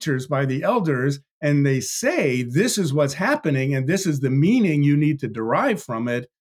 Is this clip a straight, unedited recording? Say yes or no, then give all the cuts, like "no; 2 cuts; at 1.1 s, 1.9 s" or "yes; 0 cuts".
yes; 0 cuts